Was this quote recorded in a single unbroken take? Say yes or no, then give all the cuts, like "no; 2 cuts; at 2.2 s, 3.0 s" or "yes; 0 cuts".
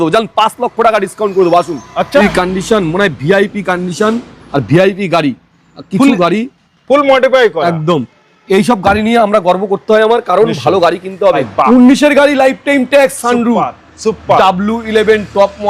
no; 2 cuts; at 2.2 s, 11.5 s